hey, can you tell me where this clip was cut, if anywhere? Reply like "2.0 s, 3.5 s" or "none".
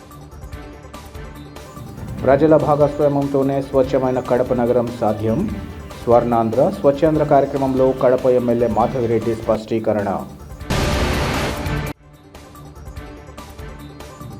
1.2 s